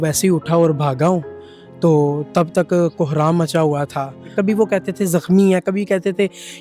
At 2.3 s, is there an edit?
no; 1 cut; at 4.2 s

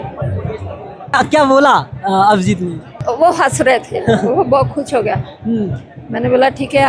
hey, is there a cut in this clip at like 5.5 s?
no; 2 cuts; at 1.1 s, 3.0 s

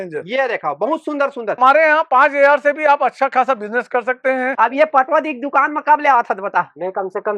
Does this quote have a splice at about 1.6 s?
yes; 2 cuts; at 1.6 s, 4.5 s

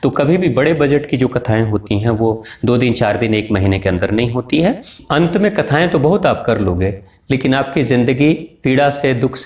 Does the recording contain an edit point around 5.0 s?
yes; 1 cut; at 5.0 s

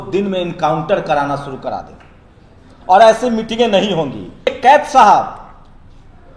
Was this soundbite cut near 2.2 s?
no; 1 cut; at 4.5 s

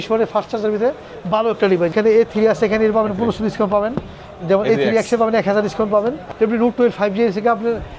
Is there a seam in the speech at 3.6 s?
no; 2 cuts; at 1.9 s, 6.2 s

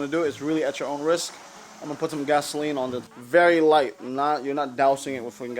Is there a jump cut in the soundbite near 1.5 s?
no; 1 cut; at 3.1 s

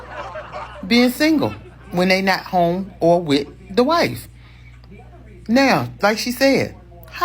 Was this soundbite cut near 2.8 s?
no; 2 cuts; at 1.6 s, 4.2 s

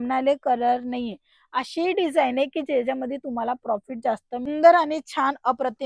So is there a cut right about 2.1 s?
no; 1 cut; at 4.5 s

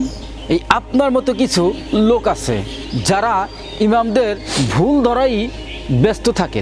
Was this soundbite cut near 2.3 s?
no; 0 cuts

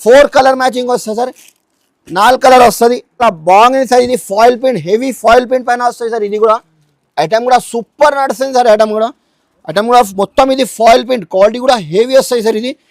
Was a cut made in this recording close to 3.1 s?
yes; 1 cut; at 3.1 s

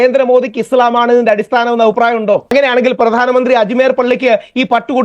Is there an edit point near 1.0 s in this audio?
no; 1 cut; at 2.4 s

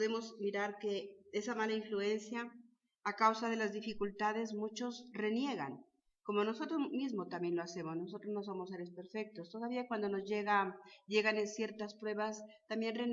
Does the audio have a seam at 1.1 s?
yes; 1 cut; at 1.1 s

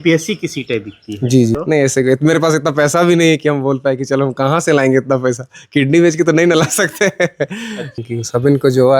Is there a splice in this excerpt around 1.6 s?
yes; 2 cuts; at 1.6 s, 8.0 s

